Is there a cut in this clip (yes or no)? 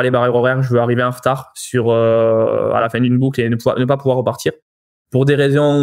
no